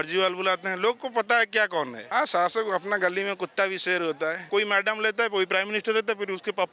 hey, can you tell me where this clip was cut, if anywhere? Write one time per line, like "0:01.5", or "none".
0:02.0
0:04.4